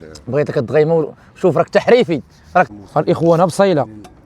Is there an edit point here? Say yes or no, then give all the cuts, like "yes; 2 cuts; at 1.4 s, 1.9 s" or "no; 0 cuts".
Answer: yes; 1 cut; at 2.7 s